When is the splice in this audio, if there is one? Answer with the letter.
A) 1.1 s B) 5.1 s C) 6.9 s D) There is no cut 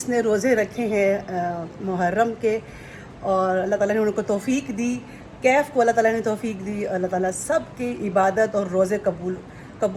D